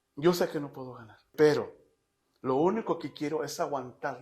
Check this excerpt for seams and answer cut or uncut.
cut